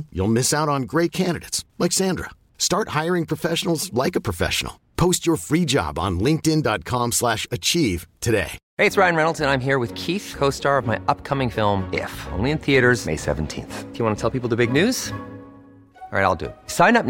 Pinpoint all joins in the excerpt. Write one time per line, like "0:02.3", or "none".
none